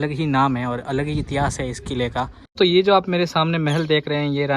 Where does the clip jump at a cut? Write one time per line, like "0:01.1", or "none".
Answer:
0:02.5